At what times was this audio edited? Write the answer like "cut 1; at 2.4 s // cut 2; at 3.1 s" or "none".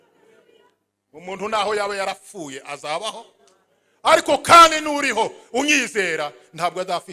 none